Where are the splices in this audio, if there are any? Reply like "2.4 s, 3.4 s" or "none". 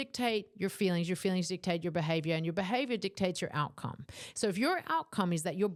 none